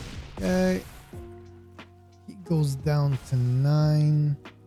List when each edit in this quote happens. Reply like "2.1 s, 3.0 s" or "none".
none